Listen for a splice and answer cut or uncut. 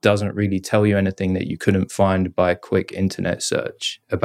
uncut